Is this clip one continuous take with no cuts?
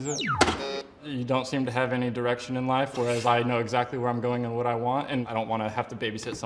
no; 1 cut; at 5.3 s

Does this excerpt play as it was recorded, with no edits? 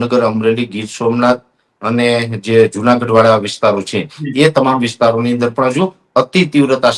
yes; 0 cuts

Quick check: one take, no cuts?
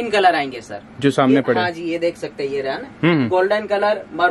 yes; 0 cuts

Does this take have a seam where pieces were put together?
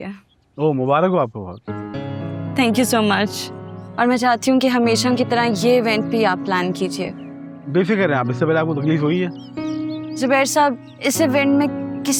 no; 0 cuts

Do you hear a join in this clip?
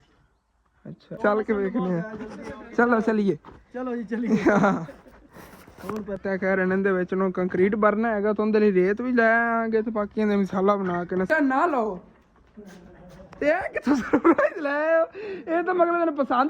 yes; 3 cuts; at 1.1 s, 6.2 s, 11.3 s

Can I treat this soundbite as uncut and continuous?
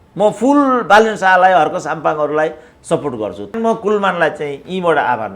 no; 1 cut; at 3.5 s

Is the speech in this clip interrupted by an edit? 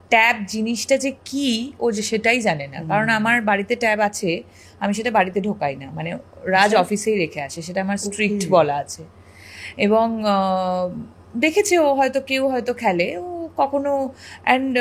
no; 0 cuts

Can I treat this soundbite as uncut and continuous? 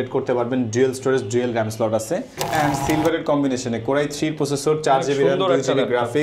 no; 1 cut; at 2.4 s

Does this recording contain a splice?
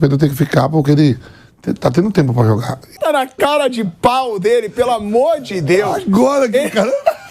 yes; 1 cut; at 2.9 s

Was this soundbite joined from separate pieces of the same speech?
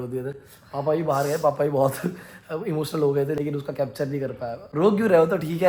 no; 0 cuts

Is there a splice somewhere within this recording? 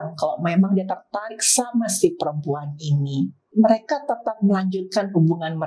yes; 1 cut; at 3.5 s

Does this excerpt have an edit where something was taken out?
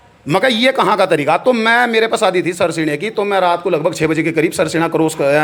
no; 0 cuts

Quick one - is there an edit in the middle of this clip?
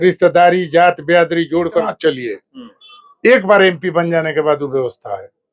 yes; 1 cut; at 1.9 s

